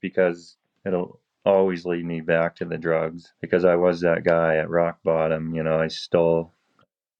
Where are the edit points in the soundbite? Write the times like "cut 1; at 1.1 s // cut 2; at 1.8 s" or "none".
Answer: cut 1; at 3.3 s